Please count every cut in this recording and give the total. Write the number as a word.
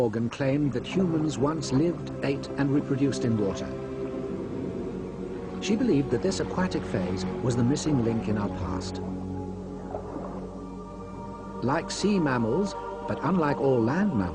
zero